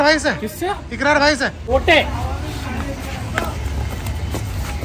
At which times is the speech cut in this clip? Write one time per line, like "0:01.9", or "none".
0:01.6